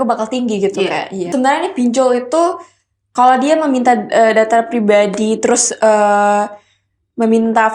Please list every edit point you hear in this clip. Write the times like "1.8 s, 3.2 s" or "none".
1.2 s